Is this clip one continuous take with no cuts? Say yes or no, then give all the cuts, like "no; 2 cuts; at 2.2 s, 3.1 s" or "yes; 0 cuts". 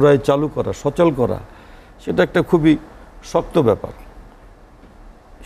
yes; 0 cuts